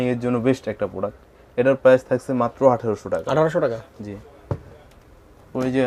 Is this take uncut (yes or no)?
yes